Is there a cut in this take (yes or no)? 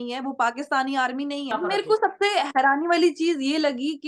yes